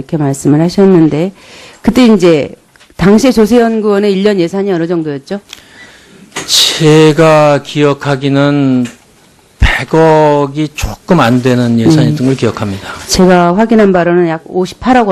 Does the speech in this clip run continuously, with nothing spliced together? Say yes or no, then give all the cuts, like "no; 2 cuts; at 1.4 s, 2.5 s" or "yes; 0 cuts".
no; 1 cut; at 11.3 s